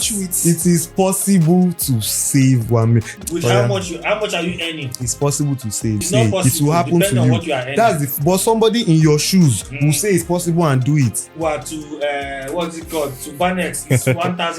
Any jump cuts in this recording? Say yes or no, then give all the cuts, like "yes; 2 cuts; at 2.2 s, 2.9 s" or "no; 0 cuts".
yes; 3 cuts; at 3.1 s, 6.0 s, 11.3 s